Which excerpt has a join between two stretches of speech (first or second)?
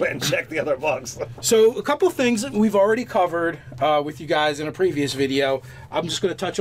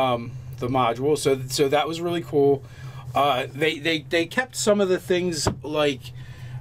first